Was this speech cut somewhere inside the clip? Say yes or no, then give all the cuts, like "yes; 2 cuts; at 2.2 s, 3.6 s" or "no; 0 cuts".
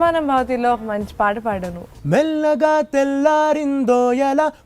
yes; 1 cut; at 1.9 s